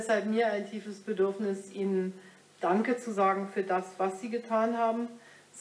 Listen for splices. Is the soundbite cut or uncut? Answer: uncut